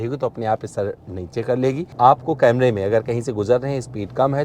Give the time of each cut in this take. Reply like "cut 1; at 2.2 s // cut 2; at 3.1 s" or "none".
cut 1; at 1.9 s